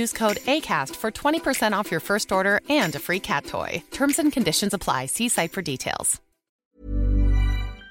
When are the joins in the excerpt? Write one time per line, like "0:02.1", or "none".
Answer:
0:06.5

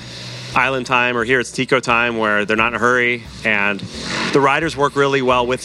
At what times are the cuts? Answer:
0:04.3

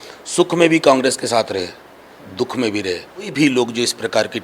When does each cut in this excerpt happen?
0:03.3

